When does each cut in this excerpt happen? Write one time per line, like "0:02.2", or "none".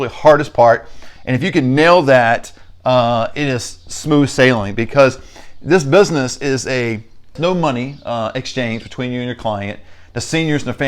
0:07.4